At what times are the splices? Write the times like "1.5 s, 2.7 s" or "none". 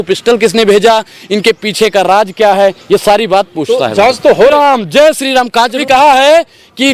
4.5 s, 5.8 s